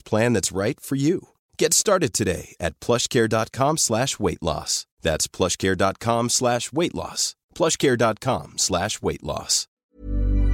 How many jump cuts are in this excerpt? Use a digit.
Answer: 1